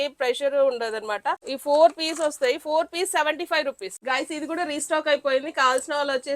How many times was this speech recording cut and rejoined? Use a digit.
2